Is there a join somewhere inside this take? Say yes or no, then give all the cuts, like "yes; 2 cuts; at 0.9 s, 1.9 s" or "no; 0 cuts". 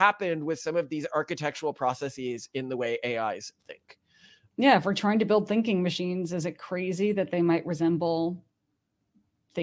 no; 0 cuts